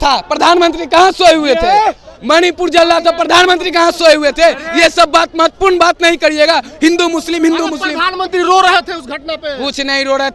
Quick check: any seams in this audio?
no; 0 cuts

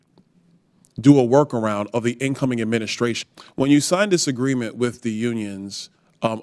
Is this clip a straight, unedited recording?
no; 1 cut; at 3.2 s

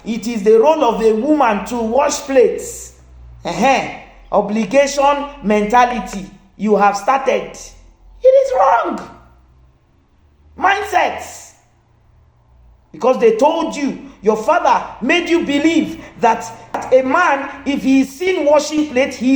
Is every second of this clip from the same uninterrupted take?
no; 1 cut; at 16.8 s

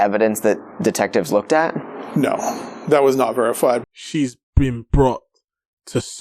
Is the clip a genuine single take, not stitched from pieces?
no; 1 cut; at 3.9 s

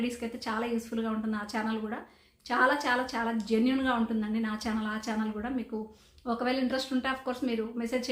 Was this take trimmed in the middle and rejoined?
no; 0 cuts

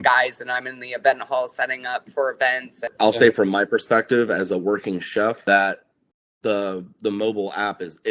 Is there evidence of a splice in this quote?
yes; 2 cuts; at 2.9 s, 5.4 s

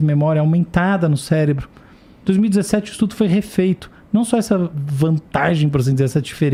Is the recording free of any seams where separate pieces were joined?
yes; 0 cuts

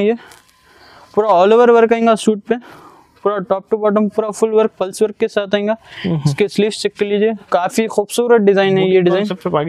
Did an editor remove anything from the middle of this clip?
yes; 1 cut; at 7.5 s

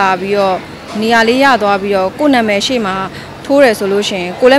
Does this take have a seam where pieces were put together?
no; 0 cuts

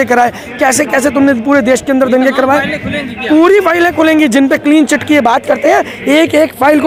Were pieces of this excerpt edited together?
no; 0 cuts

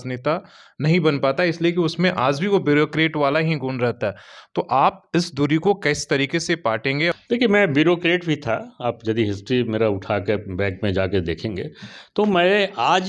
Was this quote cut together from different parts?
yes; 1 cut; at 7.1 s

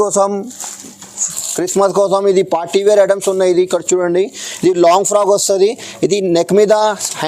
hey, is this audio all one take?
yes; 0 cuts

